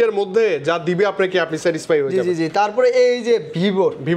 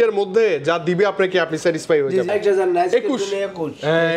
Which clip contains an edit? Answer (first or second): second